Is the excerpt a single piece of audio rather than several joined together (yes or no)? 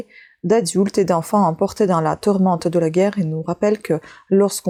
yes